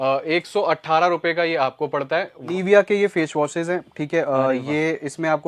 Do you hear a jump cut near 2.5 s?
yes; 1 cut; at 2.5 s

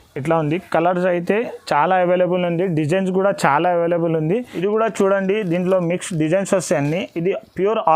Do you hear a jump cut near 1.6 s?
no; 1 cut; at 4.5 s

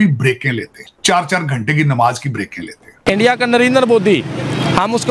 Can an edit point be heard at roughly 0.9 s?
yes; 2 cuts; at 0.9 s, 2.9 s

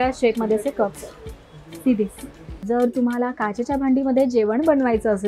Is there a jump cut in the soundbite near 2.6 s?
yes; 1 cut; at 2.6 s

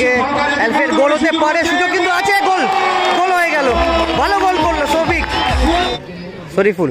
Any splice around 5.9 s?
yes; 1 cut; at 5.9 s

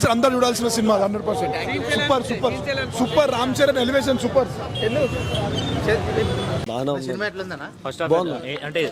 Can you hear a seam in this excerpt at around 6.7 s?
yes; 1 cut; at 6.7 s

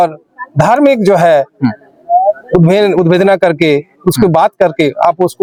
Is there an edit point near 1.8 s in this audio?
no; 0 cuts

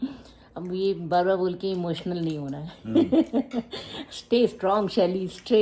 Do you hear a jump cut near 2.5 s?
no; 0 cuts

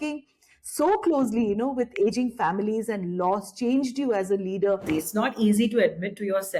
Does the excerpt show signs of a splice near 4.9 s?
yes; 1 cut; at 4.9 s

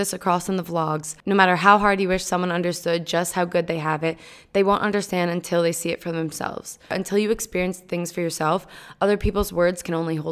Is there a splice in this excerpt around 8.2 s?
no; 1 cut; at 6.9 s

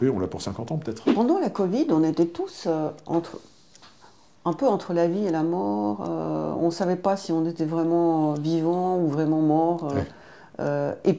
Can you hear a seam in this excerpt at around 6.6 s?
no; 1 cut; at 1.0 s

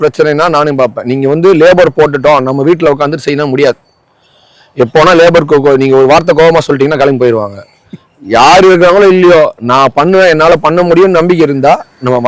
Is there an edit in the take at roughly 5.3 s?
no; 0 cuts

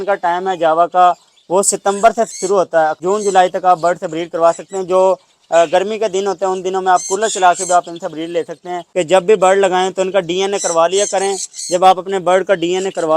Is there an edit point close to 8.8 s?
yes; 2 cuts; at 3.0 s, 8.8 s

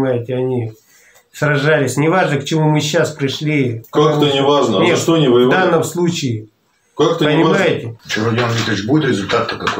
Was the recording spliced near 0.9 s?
no; 1 cut; at 7.9 s

